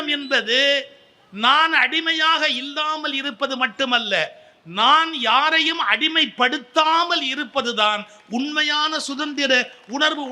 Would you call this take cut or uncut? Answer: uncut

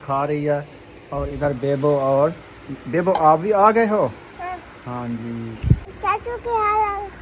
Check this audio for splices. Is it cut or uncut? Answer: cut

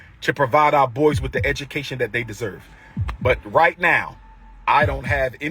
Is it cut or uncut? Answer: uncut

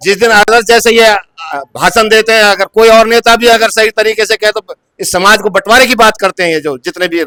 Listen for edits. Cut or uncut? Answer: uncut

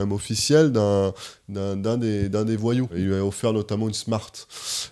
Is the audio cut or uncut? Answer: cut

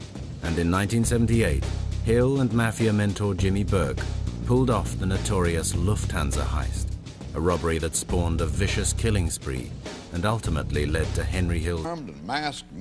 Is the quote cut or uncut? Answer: uncut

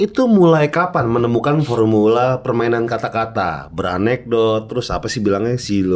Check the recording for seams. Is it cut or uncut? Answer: uncut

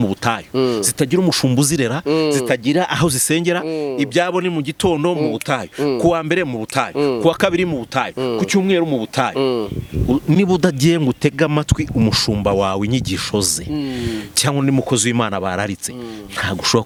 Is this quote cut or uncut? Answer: uncut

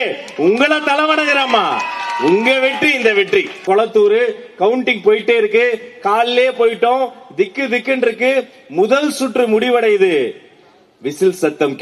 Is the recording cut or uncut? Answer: cut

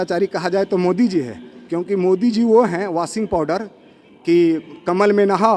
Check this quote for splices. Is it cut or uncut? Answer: uncut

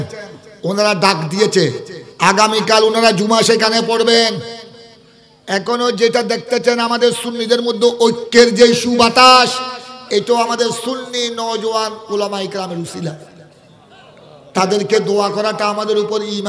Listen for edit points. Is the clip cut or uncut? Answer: uncut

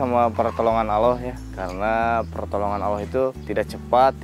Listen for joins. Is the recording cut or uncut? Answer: uncut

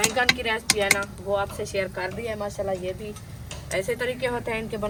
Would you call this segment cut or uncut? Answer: uncut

